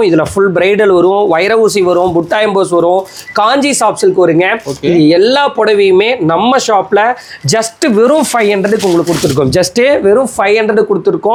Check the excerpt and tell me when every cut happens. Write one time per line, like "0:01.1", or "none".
none

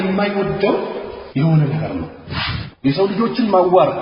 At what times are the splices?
0:01.1
0:02.4

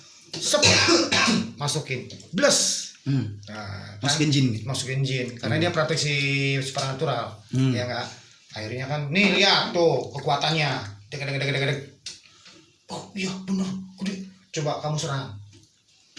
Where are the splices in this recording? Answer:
none

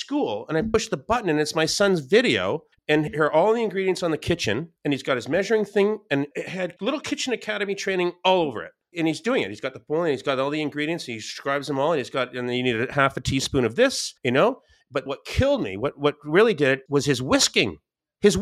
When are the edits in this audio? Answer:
0:02.7

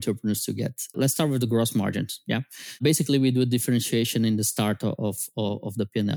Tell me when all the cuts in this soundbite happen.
0:00.9
0:02.8

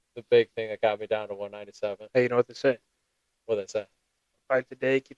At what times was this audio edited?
none

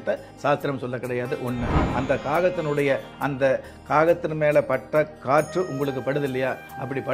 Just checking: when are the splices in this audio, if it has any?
0:01.8

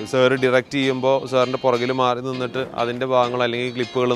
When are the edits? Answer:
none

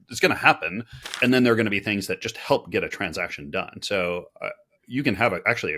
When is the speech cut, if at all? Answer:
0:01.0

